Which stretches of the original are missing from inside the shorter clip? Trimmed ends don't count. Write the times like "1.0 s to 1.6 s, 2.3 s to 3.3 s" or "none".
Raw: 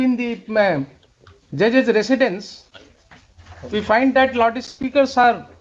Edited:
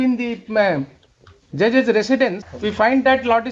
2.5 s to 3.6 s

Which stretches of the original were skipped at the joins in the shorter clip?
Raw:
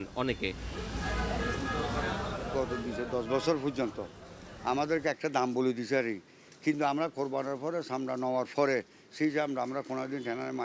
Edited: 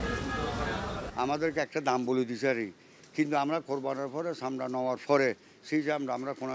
2.4 s to 4.5 s

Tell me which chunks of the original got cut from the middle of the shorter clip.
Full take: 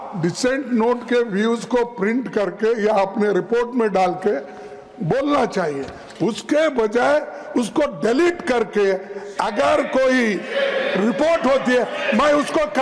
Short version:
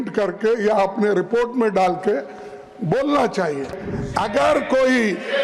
6.0 s to 9.1 s

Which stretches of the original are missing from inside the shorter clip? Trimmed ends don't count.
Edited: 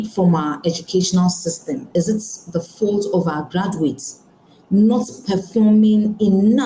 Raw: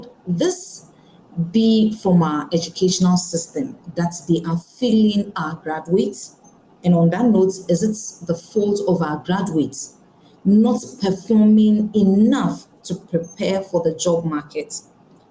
3.7 s to 7.6 s

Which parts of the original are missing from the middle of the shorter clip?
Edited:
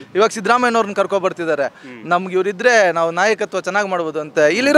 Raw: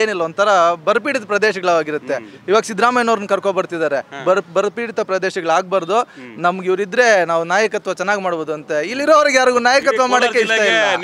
4.1 s to 6.1 s

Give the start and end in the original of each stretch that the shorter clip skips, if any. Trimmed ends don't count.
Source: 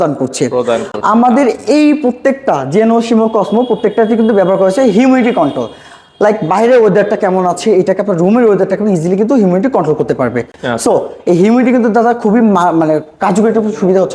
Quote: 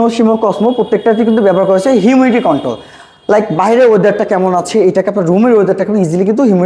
none

